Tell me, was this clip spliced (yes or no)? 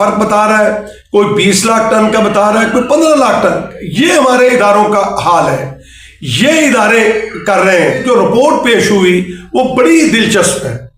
yes